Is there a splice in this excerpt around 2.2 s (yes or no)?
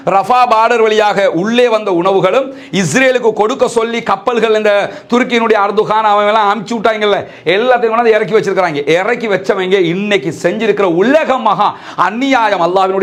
no